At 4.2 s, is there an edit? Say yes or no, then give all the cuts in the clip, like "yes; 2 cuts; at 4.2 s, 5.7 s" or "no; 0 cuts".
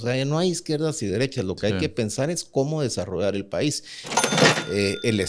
yes; 1 cut; at 4.2 s